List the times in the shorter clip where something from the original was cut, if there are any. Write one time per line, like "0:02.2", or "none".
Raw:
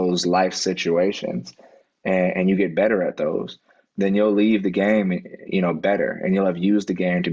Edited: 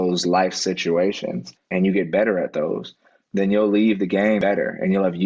0:01.7
0:04.4